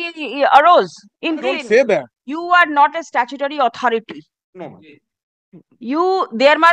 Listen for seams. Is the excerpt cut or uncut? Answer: cut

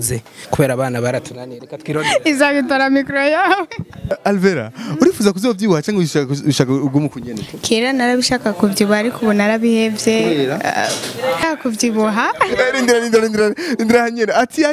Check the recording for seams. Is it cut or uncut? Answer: cut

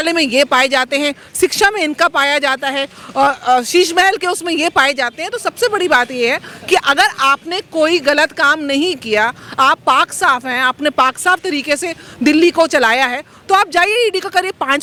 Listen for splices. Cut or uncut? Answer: uncut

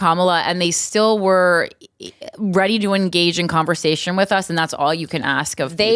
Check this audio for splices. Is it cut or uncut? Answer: uncut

